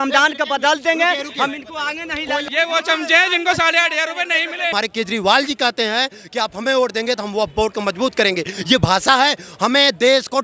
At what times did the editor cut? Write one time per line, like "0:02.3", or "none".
0:02.4
0:04.7